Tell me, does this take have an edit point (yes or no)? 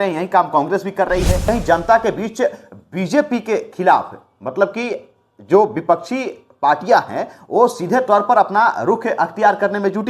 yes